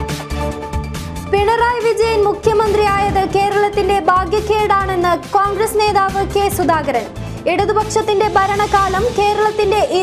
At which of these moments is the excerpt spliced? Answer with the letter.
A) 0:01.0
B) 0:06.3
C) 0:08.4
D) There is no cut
A